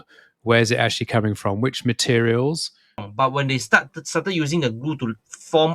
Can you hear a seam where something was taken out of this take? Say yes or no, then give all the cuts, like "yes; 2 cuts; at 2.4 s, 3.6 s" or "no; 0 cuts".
yes; 1 cut; at 3.1 s